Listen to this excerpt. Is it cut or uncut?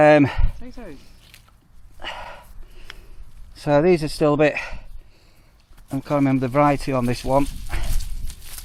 uncut